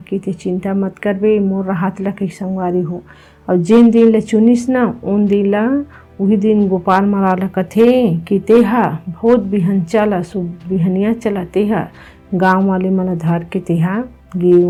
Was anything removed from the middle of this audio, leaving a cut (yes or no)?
no